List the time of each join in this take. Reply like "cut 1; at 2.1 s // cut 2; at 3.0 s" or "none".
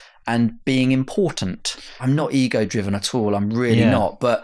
cut 1; at 2.0 s